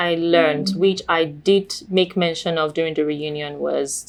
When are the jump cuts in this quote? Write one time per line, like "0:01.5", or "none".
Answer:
none